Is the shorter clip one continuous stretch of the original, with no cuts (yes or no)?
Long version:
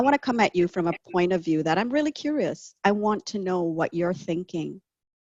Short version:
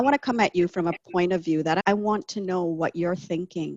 no